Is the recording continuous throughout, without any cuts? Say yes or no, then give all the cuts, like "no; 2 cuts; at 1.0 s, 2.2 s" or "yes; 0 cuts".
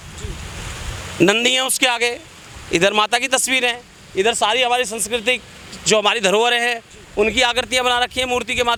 yes; 0 cuts